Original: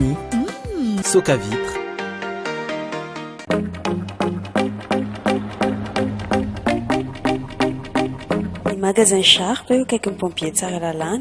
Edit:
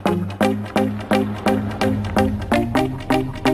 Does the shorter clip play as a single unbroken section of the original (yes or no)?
yes